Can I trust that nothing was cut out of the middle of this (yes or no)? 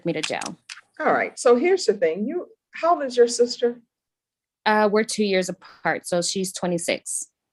yes